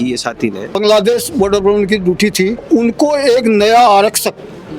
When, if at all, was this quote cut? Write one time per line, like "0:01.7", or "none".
0:00.8
0:02.6